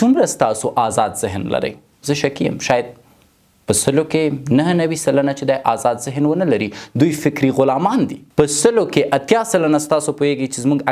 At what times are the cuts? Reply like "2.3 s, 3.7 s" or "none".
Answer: 8.2 s